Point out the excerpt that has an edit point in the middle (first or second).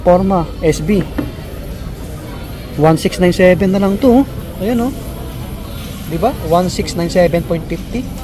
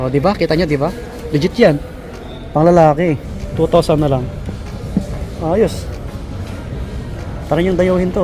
second